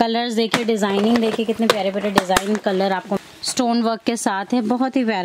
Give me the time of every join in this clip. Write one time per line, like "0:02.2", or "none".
0:03.2